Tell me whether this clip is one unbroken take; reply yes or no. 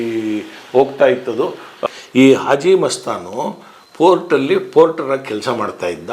no